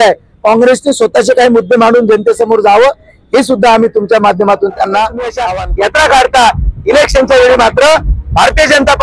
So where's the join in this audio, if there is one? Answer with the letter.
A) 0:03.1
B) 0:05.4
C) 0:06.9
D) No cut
B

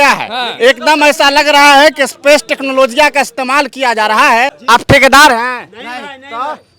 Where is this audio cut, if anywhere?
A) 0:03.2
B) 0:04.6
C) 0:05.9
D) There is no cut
B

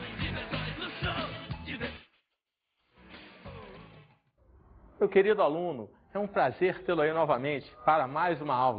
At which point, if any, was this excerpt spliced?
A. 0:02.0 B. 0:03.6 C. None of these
C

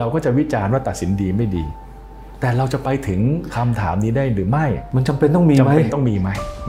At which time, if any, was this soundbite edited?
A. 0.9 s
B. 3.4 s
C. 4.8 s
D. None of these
C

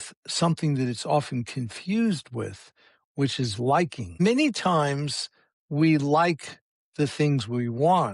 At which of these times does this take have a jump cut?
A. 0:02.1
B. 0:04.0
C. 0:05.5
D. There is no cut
B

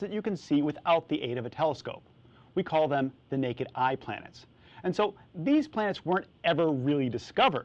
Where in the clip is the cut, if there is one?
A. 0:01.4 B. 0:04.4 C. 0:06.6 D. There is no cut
A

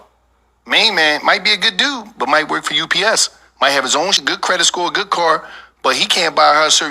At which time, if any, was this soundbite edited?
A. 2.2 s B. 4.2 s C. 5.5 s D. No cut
B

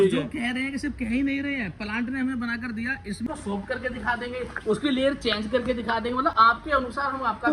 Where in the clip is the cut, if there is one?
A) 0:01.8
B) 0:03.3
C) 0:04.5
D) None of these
B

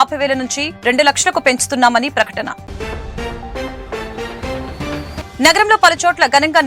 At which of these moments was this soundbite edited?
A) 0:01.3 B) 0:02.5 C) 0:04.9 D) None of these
D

